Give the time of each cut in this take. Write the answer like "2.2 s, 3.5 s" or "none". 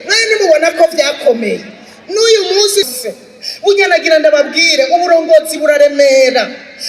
2.9 s